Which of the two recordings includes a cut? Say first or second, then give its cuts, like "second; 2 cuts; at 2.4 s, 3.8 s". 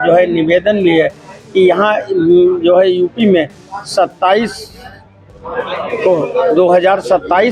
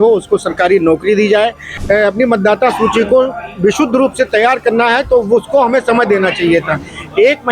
second; 1 cut; at 1.7 s